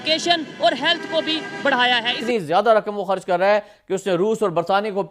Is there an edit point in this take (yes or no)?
yes